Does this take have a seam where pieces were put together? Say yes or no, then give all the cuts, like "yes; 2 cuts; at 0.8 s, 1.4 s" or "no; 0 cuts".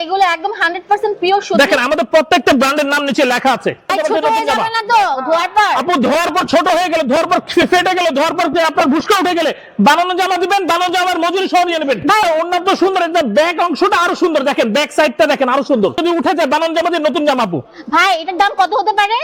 yes; 3 cuts; at 3.9 s, 12.2 s, 16.0 s